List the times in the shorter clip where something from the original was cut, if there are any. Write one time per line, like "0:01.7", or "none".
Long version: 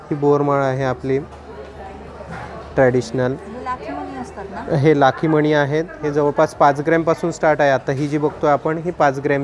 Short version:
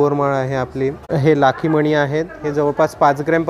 0:01.0